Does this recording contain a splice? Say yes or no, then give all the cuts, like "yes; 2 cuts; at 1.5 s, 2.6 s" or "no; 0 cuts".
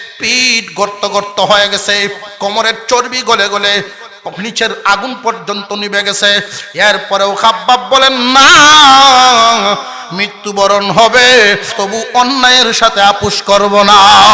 yes; 1 cut; at 11.8 s